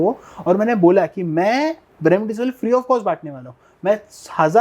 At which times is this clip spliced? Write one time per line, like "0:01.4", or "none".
0:01.9